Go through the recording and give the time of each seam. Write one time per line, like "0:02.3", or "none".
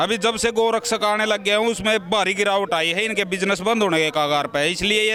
none